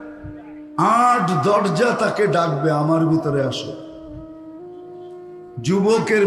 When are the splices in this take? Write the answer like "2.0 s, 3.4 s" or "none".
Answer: 4.0 s, 5.4 s